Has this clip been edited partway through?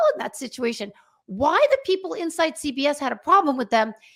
no; 0 cuts

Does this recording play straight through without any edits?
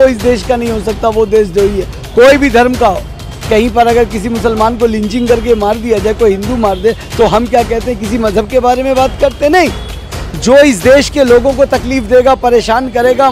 yes; 0 cuts

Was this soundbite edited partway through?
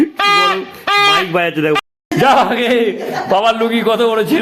yes; 1 cut; at 1.8 s

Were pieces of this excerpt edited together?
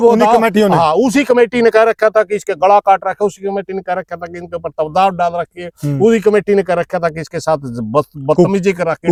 no; 0 cuts

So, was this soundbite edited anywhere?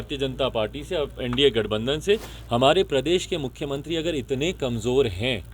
yes; 1 cut; at 2.3 s

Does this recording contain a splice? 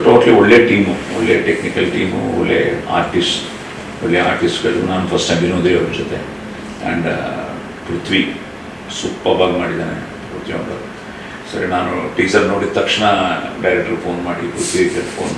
no; 0 cuts

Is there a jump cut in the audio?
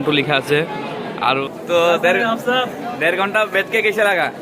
yes; 1 cut; at 1.4 s

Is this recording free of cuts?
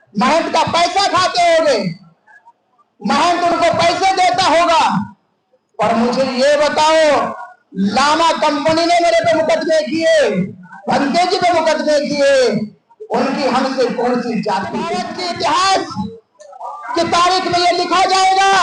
no; 1 cut; at 15.0 s

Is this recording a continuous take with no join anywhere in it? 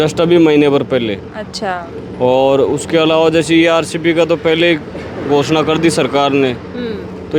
yes; 0 cuts

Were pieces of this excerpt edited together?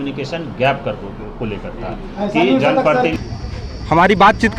yes; 1 cut; at 3.2 s

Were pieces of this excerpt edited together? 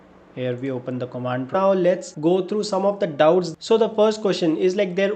yes; 2 cuts; at 1.5 s, 3.5 s

